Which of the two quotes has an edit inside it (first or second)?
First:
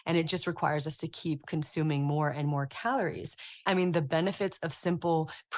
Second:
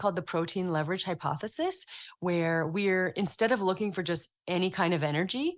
first